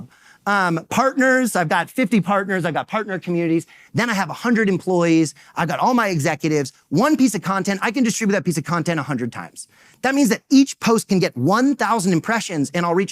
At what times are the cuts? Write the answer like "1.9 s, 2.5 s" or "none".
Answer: none

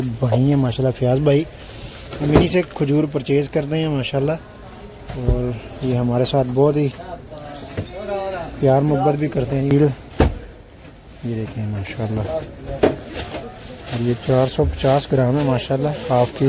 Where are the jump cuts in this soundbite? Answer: 9.7 s

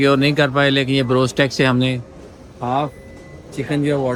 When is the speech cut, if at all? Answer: none

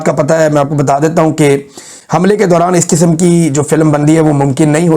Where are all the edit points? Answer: none

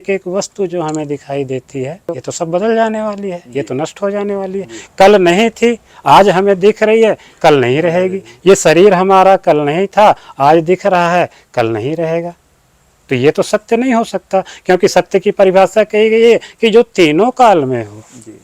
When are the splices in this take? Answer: 2.1 s

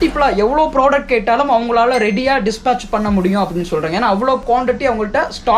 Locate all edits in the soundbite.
4.4 s

